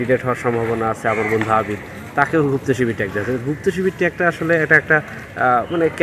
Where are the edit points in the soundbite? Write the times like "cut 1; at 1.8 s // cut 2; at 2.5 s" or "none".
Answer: none